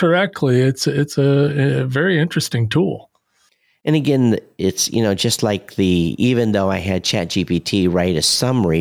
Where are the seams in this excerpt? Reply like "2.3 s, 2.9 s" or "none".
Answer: none